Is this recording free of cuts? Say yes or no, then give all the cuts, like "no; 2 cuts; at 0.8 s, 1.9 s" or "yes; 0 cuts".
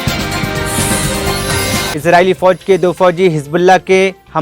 no; 1 cut; at 1.9 s